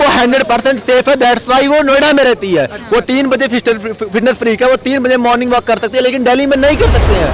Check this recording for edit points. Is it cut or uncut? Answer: uncut